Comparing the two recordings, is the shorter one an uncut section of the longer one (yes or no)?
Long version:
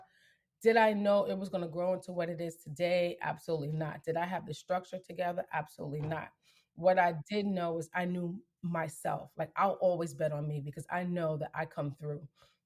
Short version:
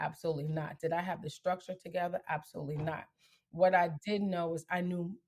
yes